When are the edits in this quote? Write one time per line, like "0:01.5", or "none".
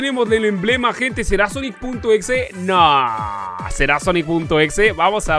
none